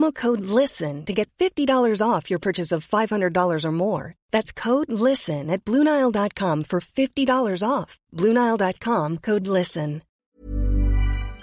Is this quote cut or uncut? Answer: cut